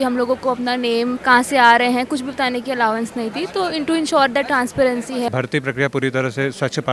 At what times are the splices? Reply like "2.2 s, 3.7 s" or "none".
1.2 s, 5.3 s

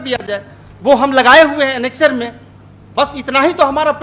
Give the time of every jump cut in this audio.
none

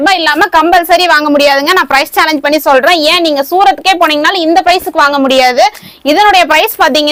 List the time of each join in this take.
none

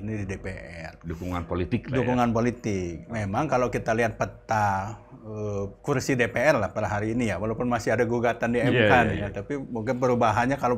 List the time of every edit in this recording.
none

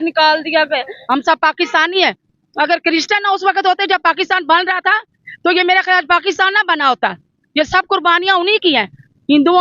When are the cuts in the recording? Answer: 0.9 s

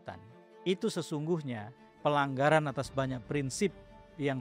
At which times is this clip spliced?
none

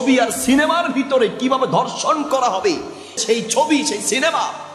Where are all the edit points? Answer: 3.2 s

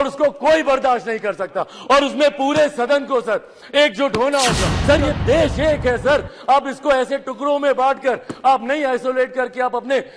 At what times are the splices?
4.7 s

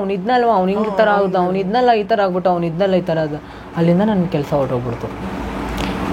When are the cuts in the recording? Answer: 5.2 s

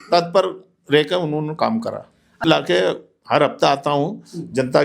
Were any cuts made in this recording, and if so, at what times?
2.4 s

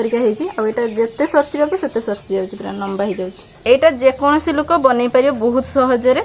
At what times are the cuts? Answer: 3.5 s

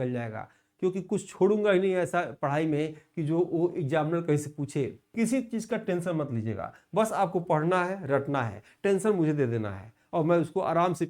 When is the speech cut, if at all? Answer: 5.0 s

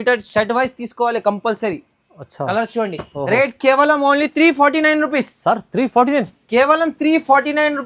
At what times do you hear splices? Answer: none

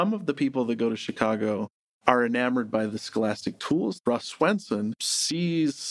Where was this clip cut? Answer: 4.0 s, 5.0 s

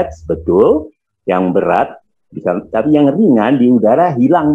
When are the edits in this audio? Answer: none

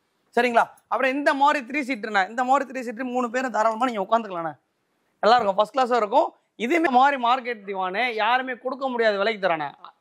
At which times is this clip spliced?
6.9 s

